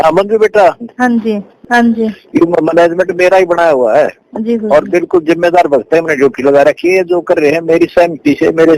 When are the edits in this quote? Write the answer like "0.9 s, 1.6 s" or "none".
1.6 s